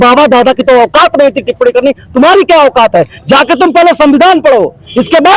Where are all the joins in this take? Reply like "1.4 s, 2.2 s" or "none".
none